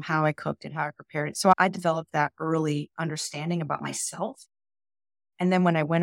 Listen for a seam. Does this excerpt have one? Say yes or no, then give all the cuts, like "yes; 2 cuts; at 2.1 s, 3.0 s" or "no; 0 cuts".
yes; 1 cut; at 1.5 s